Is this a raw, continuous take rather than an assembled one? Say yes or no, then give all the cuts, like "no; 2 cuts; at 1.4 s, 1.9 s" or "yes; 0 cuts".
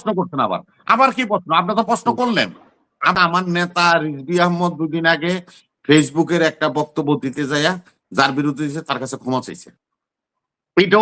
no; 1 cut; at 3.1 s